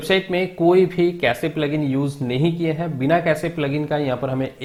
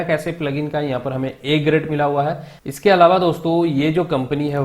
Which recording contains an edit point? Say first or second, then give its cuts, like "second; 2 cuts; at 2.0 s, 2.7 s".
second; 1 cut; at 2.5 s